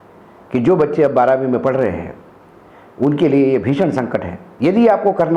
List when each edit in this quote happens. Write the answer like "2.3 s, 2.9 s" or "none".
4.4 s